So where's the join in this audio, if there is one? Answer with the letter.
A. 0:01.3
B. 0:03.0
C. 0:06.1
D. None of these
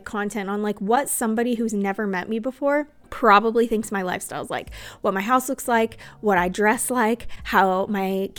B